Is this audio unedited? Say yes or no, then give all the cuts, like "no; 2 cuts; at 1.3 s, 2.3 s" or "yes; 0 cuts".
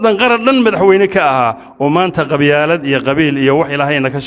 yes; 0 cuts